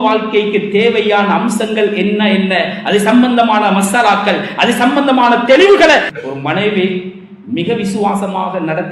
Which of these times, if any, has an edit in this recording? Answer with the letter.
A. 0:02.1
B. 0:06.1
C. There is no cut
B